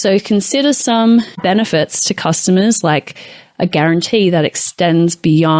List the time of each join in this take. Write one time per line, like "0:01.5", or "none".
0:01.3